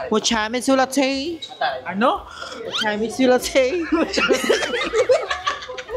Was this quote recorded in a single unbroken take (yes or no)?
yes